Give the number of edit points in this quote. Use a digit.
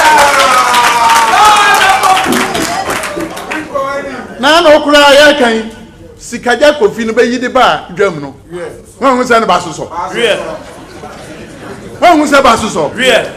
0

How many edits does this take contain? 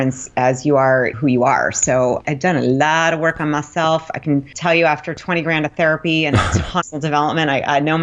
3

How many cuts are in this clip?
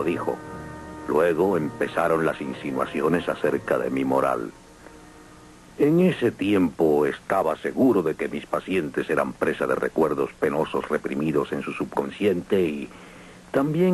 1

